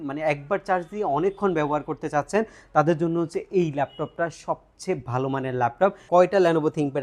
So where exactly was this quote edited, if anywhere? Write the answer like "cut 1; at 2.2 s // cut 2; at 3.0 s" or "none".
cut 1; at 6.0 s

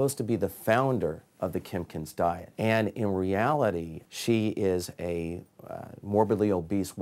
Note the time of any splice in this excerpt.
cut 1; at 2.5 s // cut 2; at 4.0 s

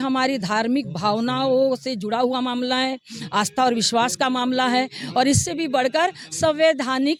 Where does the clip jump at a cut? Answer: none

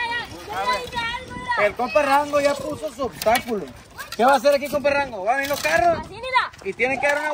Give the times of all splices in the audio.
none

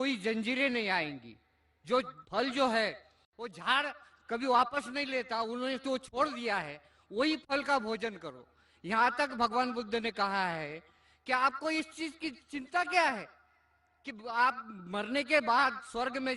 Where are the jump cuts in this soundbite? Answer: cut 1; at 2.8 s

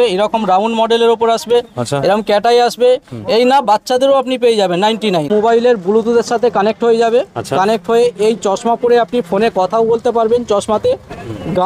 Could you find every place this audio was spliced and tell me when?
cut 1; at 5.3 s

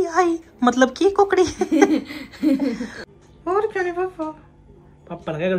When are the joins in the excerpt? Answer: cut 1; at 3.0 s

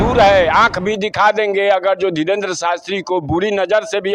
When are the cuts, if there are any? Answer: none

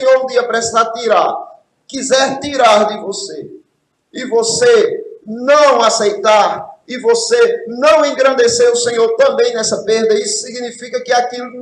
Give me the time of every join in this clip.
none

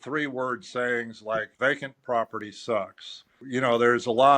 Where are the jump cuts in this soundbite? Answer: cut 1; at 1.5 s // cut 2; at 3.4 s

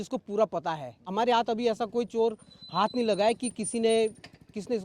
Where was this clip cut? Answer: cut 1; at 1.1 s

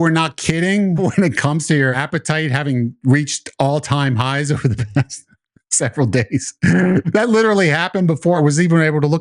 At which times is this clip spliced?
cut 1; at 1.0 s // cut 2; at 2.0 s // cut 3; at 7.1 s // cut 4; at 8.4 s

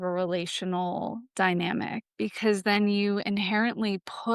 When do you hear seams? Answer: cut 1; at 2.1 s

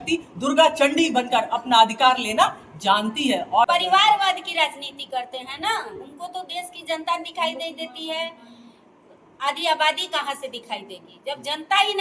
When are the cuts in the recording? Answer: cut 1; at 3.7 s

